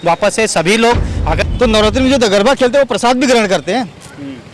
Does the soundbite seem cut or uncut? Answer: cut